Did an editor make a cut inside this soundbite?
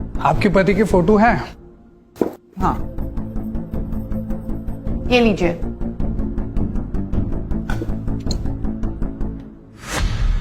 no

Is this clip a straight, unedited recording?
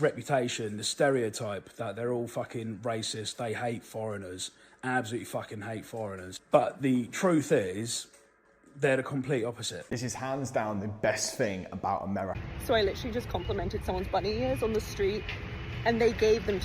no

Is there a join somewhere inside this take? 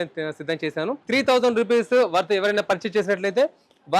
yes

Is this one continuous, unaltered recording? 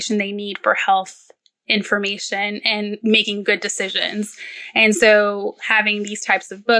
no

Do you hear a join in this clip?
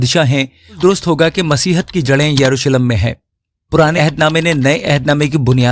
yes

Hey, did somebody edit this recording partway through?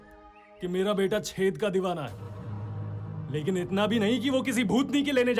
no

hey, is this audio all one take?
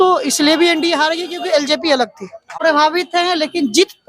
no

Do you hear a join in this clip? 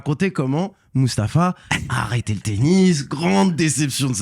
no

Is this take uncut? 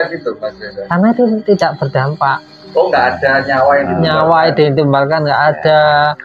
yes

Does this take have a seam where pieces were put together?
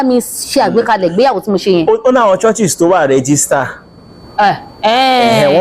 no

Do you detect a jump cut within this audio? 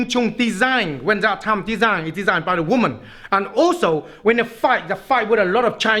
no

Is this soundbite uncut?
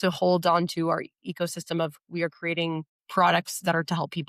no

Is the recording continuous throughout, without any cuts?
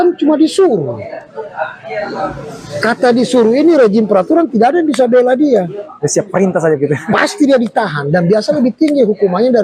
yes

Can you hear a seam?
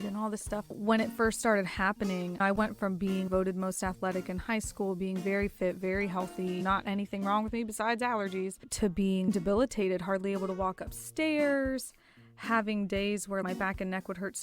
yes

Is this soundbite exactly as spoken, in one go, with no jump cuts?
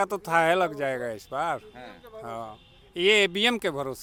yes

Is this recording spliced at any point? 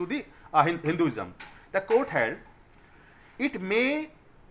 no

